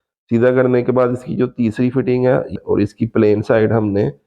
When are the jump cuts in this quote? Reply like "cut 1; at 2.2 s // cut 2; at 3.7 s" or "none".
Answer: cut 1; at 2.5 s